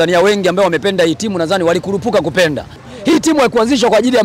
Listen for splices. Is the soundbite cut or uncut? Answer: cut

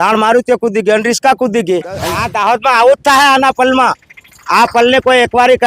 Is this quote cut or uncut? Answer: cut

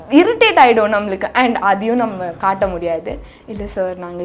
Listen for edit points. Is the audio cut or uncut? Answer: uncut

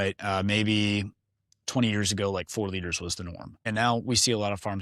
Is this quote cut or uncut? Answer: cut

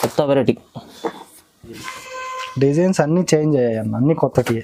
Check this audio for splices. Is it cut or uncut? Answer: uncut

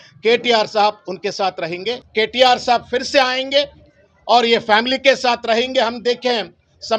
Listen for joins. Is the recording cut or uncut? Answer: cut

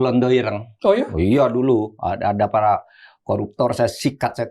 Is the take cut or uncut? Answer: uncut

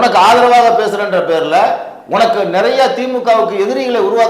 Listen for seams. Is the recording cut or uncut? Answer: uncut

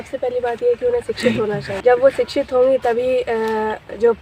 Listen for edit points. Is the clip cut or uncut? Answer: cut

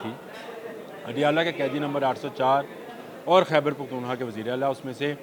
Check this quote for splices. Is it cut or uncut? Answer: uncut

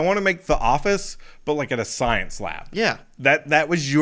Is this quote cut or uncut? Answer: uncut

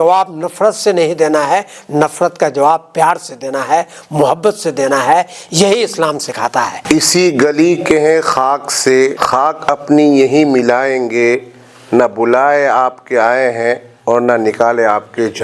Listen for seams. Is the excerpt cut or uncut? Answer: cut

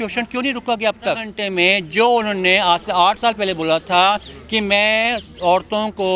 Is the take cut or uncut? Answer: cut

